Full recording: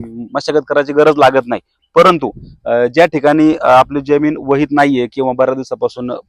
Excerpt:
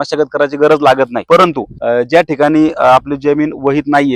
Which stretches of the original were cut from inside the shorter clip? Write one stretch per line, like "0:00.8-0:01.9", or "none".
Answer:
0:01.8-0:02.3

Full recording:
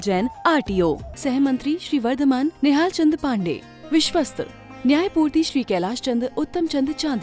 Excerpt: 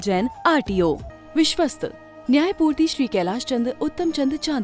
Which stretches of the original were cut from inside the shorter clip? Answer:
0:01.1-0:03.7

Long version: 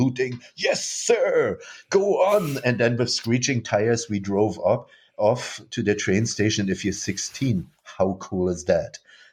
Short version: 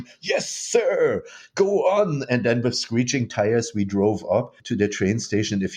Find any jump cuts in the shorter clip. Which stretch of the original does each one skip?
0:04.9-0:05.7

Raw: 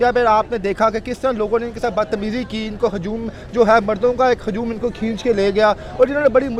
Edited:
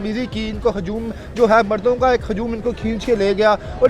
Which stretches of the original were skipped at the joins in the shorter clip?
none

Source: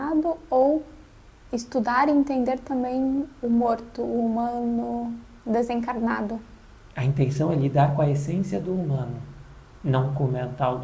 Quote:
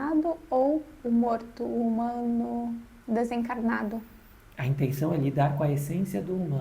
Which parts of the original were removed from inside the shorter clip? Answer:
0:00.9-0:03.3

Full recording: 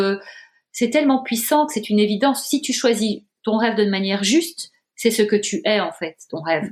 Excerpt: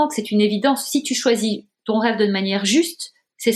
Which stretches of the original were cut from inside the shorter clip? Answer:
none

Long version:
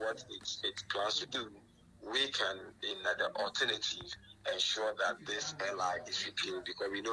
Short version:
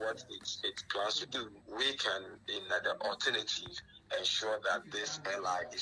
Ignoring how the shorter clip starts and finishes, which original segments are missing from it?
0:01.6-0:01.9

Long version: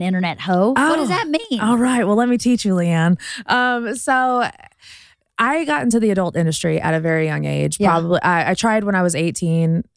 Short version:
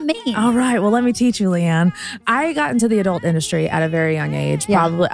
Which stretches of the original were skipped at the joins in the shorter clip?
0:03.3-0:05.2

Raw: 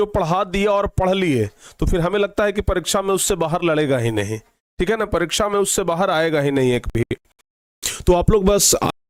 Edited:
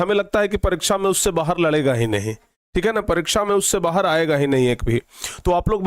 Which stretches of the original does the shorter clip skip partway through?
0:06.9-0:07.4

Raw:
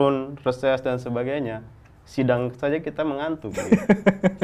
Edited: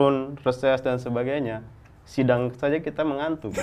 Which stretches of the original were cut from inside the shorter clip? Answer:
none

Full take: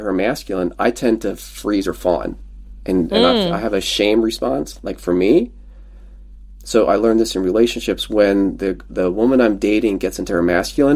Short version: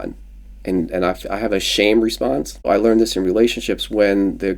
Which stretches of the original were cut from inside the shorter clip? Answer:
0:04.9-0:06.9

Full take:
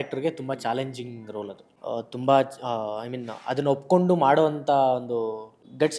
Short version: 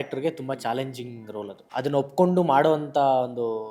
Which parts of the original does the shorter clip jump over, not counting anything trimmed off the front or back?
0:01.6-0:03.3

